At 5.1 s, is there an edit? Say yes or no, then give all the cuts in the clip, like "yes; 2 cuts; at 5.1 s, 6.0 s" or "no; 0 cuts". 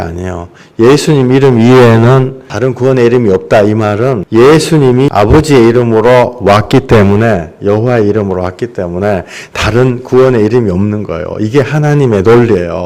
yes; 2 cuts; at 4.2 s, 5.1 s